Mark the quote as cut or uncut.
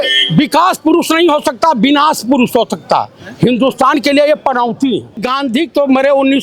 cut